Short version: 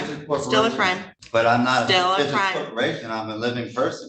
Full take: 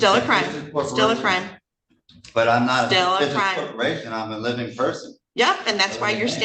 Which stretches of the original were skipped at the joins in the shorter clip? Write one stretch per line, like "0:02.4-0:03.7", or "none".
0:01.6-0:02.1

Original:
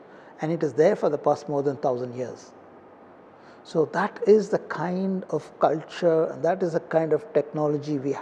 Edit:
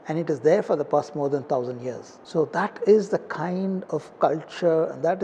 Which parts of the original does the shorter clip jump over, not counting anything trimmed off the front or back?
0:02.5-0:03.5

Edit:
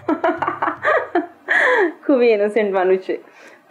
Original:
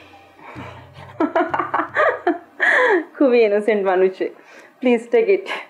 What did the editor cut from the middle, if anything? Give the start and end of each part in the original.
none

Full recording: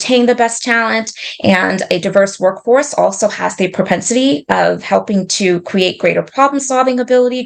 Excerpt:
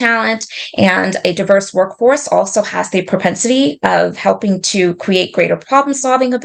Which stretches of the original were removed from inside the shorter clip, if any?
none

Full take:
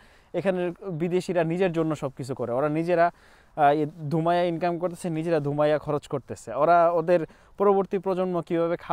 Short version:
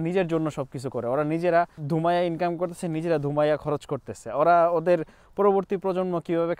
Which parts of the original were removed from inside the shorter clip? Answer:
0:03.2-0:04.0

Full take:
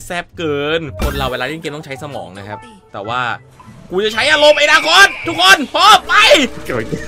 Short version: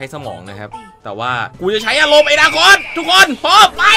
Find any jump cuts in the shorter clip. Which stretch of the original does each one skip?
0:03.4-0:03.8

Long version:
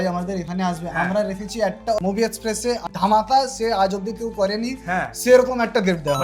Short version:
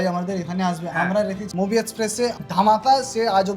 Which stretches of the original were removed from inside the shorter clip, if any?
0:01.8-0:02.3

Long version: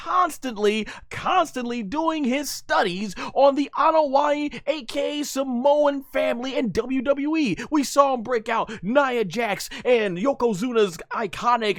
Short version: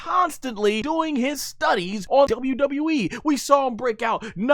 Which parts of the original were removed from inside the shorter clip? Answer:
0:00.8-0:01.9
0:03.3-0:06.7

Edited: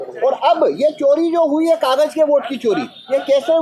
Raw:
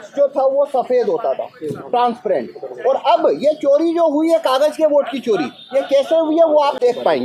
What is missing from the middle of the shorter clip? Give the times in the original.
none

